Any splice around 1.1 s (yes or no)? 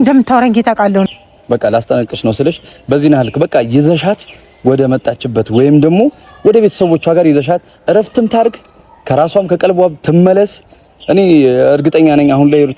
yes